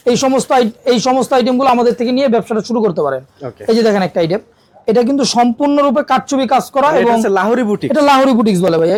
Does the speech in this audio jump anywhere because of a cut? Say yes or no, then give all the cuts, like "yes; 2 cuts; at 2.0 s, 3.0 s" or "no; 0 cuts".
no; 0 cuts